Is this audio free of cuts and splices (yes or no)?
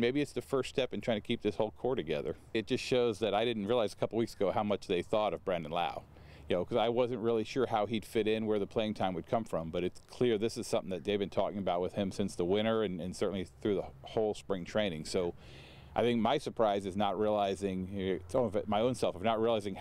no